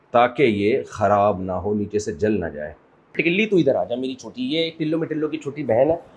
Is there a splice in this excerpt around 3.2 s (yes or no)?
yes